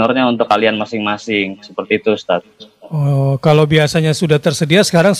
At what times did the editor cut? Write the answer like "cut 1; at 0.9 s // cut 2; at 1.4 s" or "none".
none